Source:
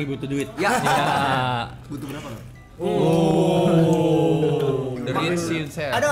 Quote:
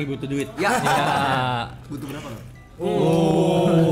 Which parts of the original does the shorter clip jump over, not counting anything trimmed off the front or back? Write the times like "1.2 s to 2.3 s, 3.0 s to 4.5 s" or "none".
none